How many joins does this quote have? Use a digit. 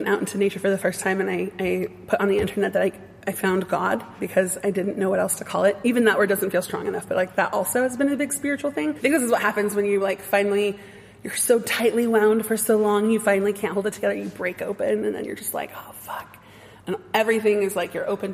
2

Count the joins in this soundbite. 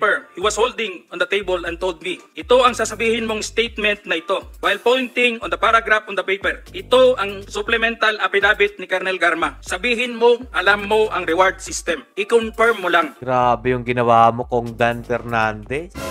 0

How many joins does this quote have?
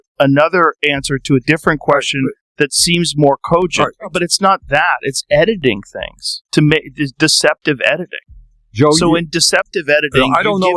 1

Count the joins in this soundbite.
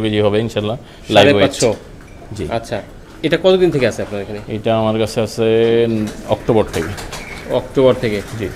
0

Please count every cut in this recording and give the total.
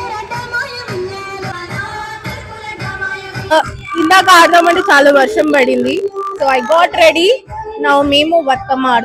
1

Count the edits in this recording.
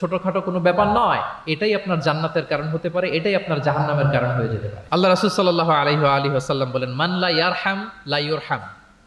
0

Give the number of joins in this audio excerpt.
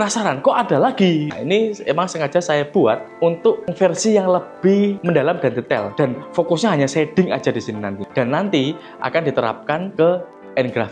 4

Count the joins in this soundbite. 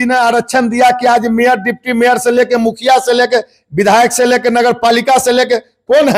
0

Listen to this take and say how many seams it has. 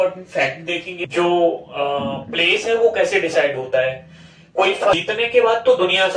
2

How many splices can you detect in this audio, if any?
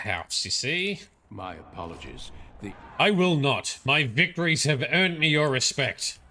1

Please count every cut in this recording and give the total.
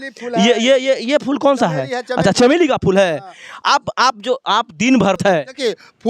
1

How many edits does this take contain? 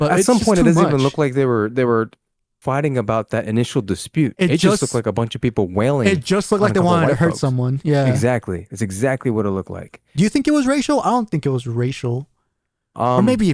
0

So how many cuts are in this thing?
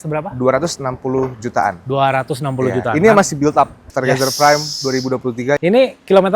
2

